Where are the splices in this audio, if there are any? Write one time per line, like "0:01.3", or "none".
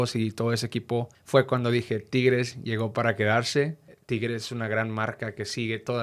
0:01.2
0:03.9